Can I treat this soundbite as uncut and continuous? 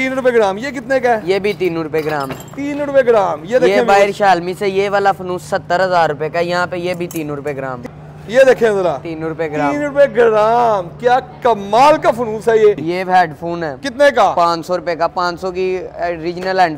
no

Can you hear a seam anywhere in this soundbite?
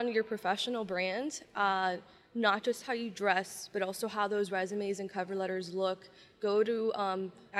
no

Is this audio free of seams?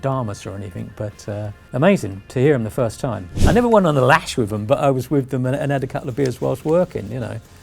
no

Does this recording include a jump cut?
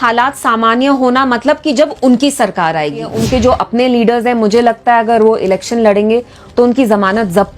yes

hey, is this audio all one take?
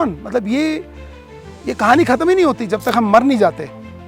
yes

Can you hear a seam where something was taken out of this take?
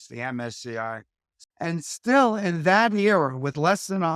yes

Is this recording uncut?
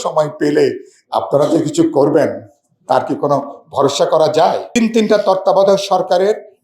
no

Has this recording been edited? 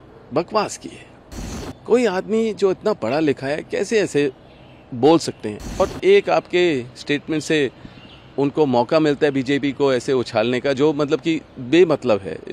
yes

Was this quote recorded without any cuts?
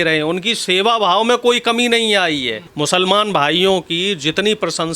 no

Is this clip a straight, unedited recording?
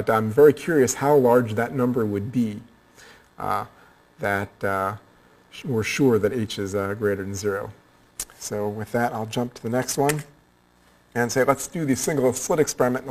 yes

